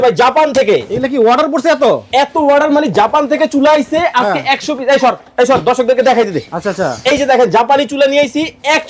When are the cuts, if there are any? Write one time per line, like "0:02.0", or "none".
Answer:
none